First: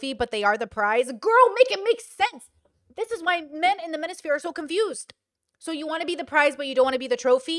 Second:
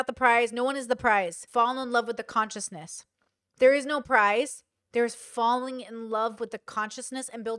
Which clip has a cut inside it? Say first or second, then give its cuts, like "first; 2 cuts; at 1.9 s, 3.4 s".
second; 1 cut; at 1.4 s